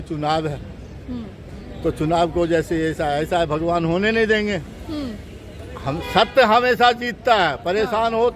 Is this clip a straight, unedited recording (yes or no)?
yes